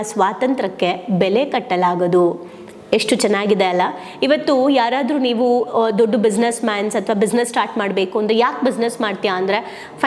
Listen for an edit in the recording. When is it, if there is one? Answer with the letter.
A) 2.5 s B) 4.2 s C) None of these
C